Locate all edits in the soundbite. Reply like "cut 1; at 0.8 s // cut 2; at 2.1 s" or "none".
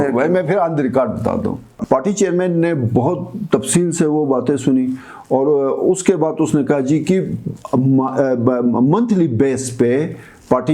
cut 1; at 1.7 s